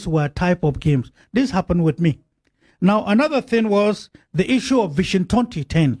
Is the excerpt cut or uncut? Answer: uncut